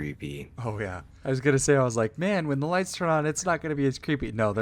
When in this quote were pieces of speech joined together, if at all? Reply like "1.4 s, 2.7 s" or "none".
1.1 s